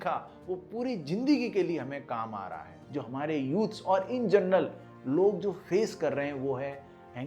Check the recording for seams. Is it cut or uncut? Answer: cut